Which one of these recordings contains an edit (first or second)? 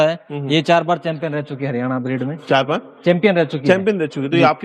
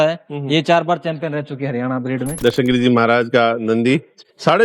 second